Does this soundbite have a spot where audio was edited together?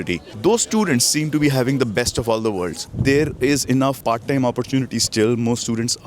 yes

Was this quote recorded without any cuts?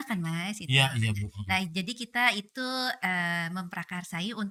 yes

